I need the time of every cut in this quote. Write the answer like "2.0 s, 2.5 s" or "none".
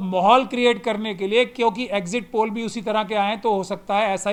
none